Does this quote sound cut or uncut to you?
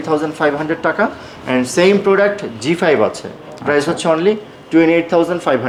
uncut